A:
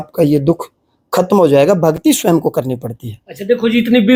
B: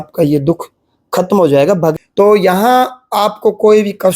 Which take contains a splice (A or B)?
B